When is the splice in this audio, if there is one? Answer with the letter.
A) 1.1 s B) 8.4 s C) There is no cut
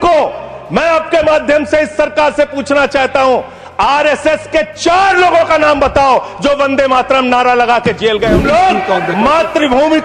B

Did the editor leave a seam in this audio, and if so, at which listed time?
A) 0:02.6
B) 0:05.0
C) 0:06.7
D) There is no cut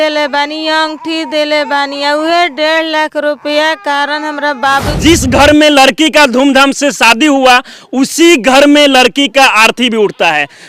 B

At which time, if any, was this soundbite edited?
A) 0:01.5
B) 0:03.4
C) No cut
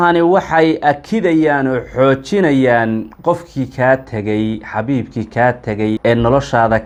C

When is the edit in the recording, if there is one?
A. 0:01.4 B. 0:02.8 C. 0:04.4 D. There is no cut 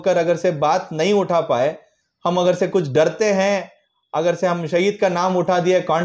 D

